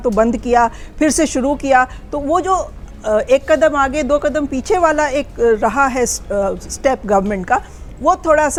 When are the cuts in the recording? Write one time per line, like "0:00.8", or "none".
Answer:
none